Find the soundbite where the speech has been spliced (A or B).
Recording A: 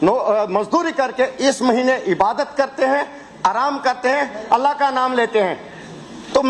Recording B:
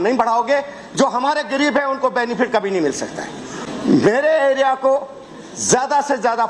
B